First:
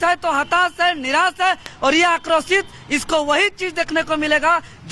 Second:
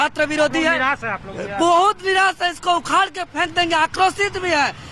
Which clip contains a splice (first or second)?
first